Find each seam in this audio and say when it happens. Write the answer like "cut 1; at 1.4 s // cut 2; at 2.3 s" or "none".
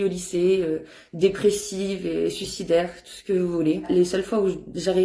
cut 1; at 3.8 s